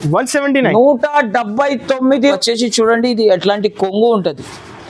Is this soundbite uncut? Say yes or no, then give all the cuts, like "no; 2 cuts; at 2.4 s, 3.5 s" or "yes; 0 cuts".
no; 1 cut; at 2.3 s